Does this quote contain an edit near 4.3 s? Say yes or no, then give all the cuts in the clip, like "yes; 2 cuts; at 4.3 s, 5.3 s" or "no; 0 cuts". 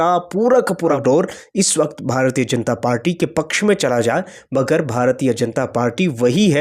no; 1 cut; at 1.0 s